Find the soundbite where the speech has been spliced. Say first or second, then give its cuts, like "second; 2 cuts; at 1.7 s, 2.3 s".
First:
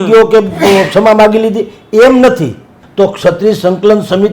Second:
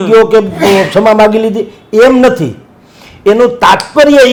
first; 1 cut; at 2.8 s